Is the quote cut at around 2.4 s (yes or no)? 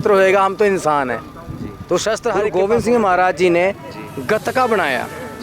yes